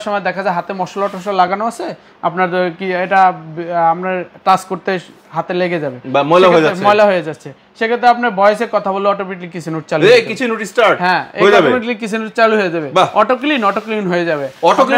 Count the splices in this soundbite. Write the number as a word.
zero